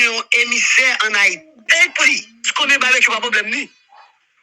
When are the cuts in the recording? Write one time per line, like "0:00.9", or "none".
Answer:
0:01.5